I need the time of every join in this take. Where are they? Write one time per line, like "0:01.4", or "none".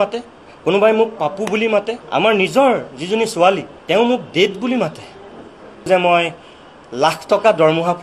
0:02.0
0:03.7
0:05.9